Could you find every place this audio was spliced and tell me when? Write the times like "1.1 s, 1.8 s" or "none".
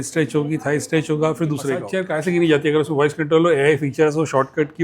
1.9 s